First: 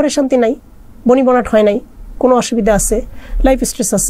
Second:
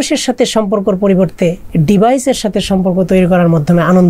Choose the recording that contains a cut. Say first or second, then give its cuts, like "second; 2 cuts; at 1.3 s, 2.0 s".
second; 1 cut; at 1.6 s